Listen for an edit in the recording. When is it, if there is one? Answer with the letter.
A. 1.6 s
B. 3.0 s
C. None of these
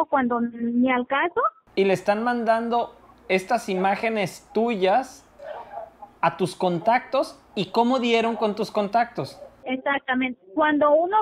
A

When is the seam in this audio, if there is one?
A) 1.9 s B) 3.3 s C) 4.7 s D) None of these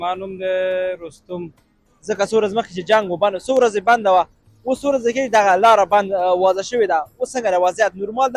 A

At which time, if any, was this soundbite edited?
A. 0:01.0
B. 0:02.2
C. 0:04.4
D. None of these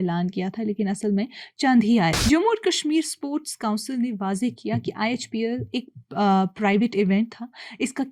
B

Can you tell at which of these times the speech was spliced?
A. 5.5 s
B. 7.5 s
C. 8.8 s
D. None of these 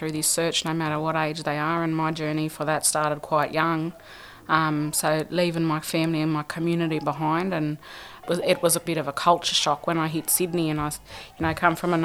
C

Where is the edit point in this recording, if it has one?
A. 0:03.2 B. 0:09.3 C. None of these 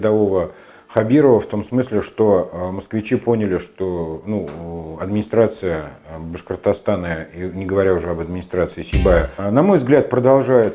B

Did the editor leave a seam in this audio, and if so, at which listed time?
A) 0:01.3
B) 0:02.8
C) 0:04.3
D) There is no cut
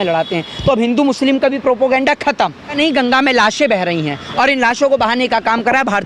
B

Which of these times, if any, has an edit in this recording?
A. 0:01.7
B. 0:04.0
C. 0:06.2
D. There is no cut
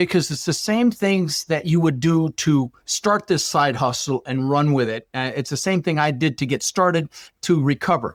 D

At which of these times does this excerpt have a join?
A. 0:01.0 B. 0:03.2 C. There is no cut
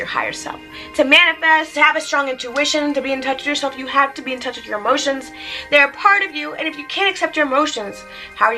C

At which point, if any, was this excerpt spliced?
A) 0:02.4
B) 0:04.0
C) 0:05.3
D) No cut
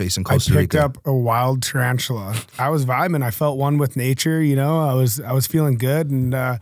A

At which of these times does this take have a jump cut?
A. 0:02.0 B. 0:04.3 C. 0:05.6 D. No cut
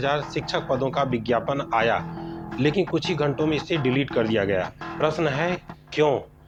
D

